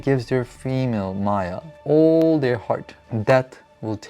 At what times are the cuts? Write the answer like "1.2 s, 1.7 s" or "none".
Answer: 1.7 s, 3.0 s